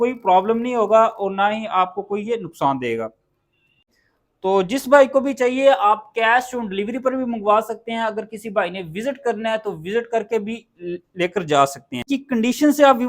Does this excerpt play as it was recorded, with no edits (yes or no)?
no